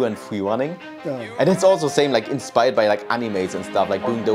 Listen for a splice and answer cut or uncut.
cut